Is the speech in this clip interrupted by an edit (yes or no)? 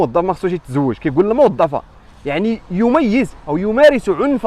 no